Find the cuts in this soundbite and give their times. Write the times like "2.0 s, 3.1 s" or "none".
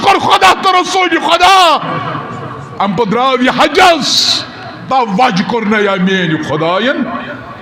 none